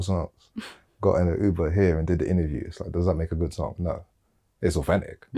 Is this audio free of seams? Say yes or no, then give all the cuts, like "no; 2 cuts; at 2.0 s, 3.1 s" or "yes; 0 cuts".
yes; 0 cuts